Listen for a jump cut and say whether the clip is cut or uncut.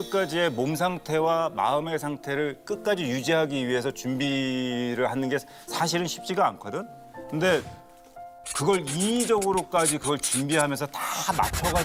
uncut